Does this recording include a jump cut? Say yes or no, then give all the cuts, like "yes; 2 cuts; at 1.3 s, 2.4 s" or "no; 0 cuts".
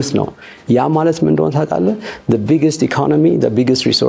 no; 0 cuts